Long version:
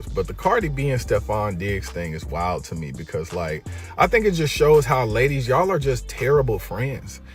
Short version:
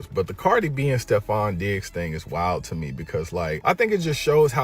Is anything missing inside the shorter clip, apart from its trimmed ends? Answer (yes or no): yes